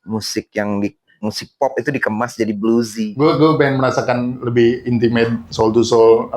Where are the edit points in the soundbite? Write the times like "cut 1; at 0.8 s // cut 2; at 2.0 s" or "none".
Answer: cut 1; at 3.0 s